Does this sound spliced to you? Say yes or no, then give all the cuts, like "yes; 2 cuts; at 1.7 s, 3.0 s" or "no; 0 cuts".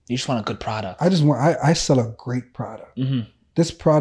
no; 0 cuts